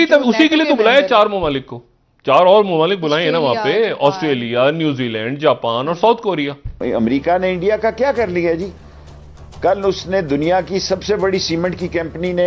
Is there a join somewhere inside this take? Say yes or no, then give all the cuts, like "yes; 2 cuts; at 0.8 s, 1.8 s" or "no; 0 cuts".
yes; 1 cut; at 6.8 s